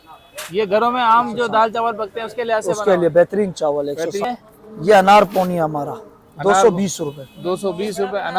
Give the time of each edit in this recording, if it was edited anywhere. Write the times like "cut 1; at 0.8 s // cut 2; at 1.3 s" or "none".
cut 1; at 4.2 s